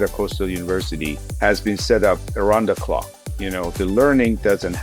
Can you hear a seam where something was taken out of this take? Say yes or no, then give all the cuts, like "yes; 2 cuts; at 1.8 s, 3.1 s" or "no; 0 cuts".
yes; 1 cut; at 1.2 s